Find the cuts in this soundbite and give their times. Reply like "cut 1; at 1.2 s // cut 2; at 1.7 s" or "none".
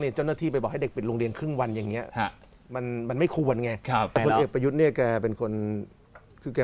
cut 1; at 4.2 s

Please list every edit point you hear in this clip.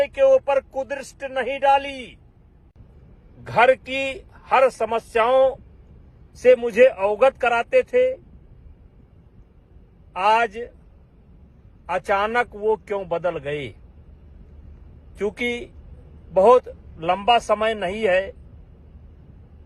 none

